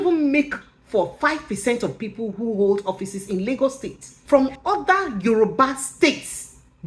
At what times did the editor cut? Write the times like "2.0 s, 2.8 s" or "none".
4.2 s